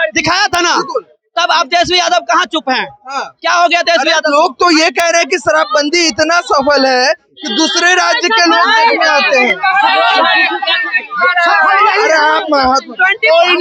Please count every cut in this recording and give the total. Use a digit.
0